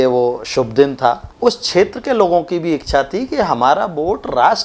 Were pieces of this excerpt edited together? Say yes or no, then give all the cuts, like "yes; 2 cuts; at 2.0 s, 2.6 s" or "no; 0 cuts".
yes; 1 cut; at 1.3 s